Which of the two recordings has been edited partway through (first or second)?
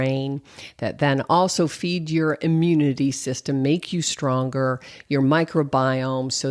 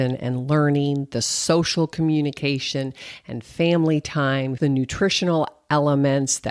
second